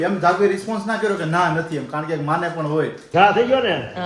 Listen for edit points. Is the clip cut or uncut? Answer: cut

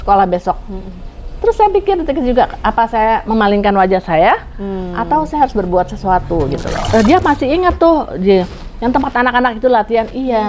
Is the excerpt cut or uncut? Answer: cut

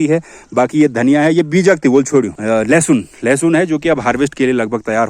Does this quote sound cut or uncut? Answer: cut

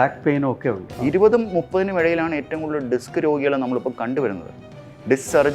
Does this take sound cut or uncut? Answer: cut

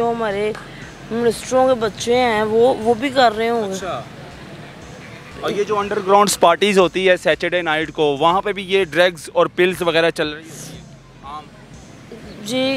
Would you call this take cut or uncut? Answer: uncut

